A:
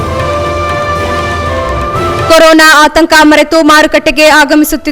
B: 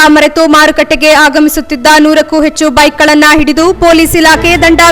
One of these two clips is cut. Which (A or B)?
A